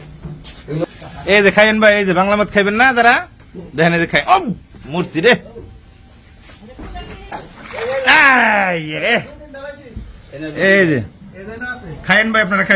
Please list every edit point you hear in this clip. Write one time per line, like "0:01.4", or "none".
0:00.9
0:07.3